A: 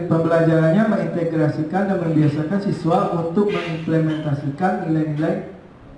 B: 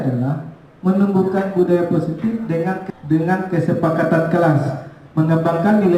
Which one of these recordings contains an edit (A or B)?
B